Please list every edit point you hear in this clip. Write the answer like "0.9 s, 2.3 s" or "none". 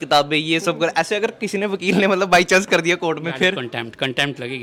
none